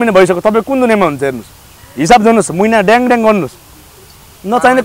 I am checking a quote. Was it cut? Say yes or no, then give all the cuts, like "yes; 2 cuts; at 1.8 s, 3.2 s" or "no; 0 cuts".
no; 0 cuts